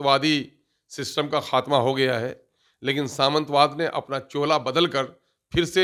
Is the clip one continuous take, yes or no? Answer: yes